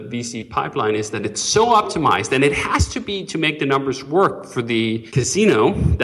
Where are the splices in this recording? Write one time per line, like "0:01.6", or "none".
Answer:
0:05.0

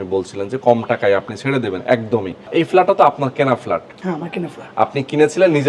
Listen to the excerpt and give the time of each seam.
0:02.5

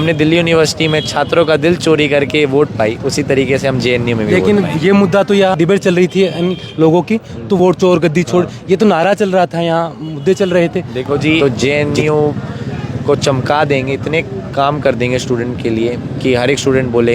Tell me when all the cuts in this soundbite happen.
0:05.5
0:07.6
0:11.4

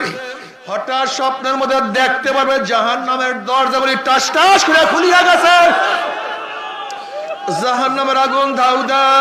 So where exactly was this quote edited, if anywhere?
none

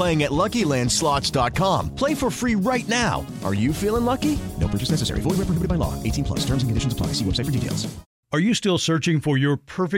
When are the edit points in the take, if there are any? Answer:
0:08.1

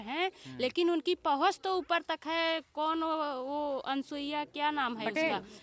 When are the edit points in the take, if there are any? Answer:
none

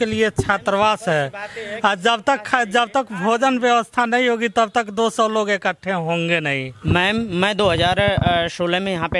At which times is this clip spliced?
0:06.7

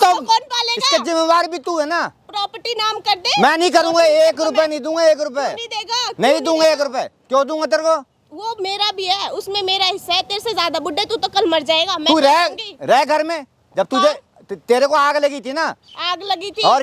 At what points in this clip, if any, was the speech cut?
none

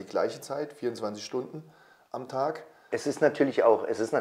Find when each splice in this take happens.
0:02.8

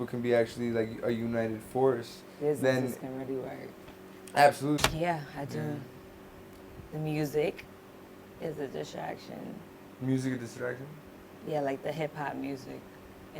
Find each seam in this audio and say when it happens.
0:04.8

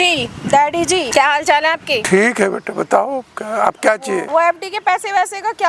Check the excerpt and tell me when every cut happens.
0:01.1
0:02.0
0:04.3

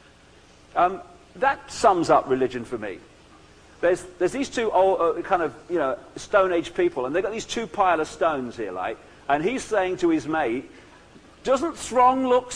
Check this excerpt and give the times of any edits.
0:05.8

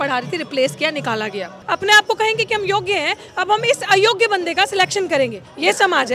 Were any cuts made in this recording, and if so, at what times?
0:01.5

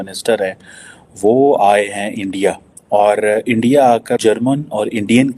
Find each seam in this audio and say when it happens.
0:04.2

